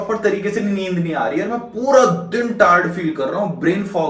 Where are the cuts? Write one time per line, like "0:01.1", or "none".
none